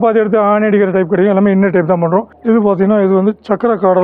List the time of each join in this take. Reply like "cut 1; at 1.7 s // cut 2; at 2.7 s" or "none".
cut 1; at 2.3 s